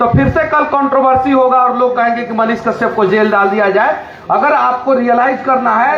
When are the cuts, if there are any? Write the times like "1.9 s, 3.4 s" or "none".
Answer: none